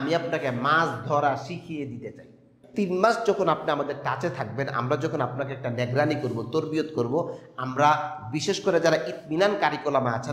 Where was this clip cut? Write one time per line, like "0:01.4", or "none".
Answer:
0:02.6